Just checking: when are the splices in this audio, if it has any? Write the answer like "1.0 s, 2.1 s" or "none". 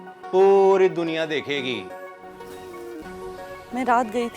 2.8 s